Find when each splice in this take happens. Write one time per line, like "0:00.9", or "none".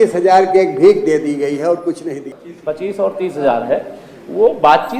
0:02.2